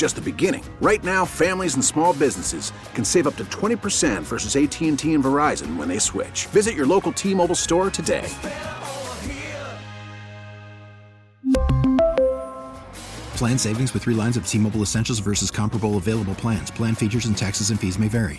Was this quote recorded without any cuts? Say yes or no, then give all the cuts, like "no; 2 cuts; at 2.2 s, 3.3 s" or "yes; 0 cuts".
yes; 0 cuts